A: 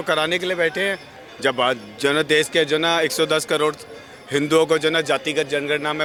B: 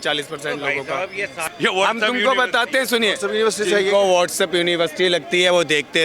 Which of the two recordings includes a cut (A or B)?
B